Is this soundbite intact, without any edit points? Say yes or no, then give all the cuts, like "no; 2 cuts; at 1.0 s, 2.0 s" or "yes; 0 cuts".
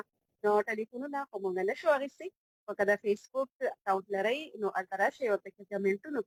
yes; 0 cuts